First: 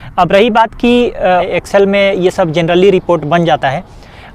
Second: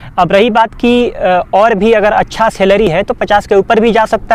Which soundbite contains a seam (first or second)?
first